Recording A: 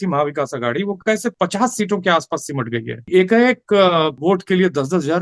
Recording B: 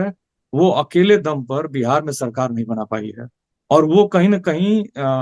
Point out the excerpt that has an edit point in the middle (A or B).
A